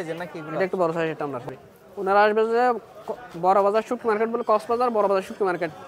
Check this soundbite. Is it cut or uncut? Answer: cut